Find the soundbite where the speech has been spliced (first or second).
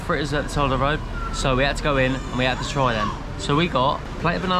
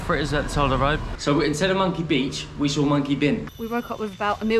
second